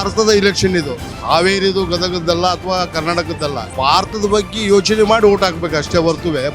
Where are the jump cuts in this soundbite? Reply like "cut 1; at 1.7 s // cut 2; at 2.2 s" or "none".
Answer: cut 1; at 1.1 s // cut 2; at 3.7 s